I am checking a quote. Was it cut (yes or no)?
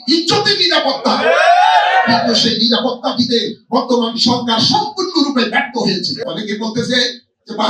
yes